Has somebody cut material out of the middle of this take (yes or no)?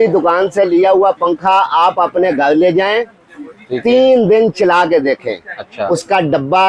no